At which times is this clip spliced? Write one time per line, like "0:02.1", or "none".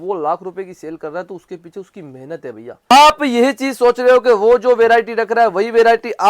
0:02.9